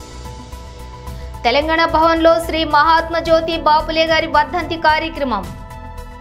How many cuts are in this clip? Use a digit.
1